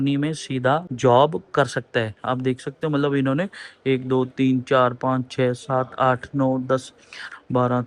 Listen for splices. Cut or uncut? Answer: cut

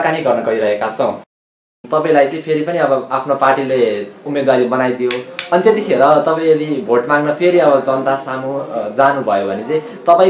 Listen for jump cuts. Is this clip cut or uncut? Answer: cut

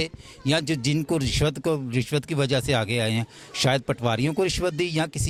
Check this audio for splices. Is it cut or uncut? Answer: uncut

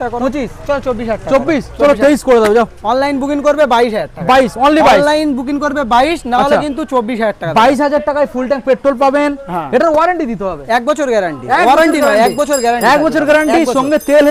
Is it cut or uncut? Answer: uncut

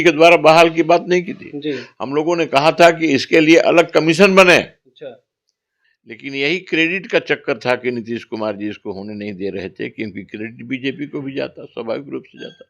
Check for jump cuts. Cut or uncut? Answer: cut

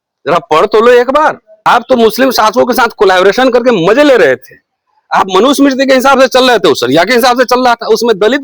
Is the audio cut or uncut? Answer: cut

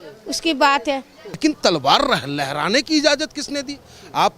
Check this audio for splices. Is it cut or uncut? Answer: cut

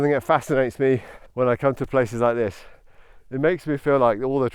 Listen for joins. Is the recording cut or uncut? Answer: cut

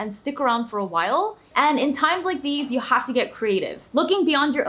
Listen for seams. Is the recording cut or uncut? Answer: cut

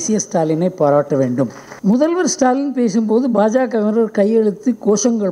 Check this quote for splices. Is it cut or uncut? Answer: cut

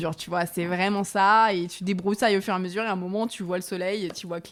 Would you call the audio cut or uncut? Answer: uncut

